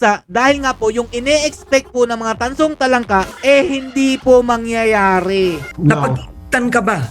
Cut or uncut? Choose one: cut